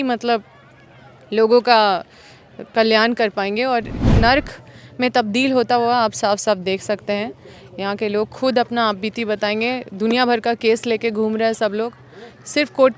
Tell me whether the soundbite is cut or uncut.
cut